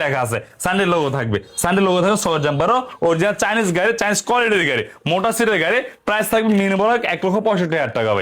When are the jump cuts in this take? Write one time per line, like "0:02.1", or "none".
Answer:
none